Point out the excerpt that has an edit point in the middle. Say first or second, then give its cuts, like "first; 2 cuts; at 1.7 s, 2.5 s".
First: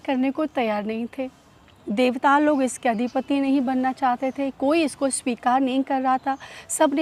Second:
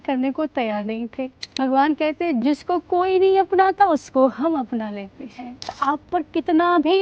second; 3 cuts; at 1.4 s, 2.4 s, 5.7 s